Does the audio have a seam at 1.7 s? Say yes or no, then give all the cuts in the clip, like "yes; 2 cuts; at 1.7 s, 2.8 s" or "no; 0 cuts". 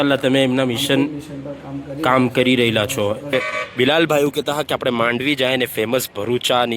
no; 1 cut; at 3.3 s